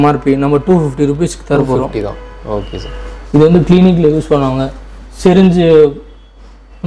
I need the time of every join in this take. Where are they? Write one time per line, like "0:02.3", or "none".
none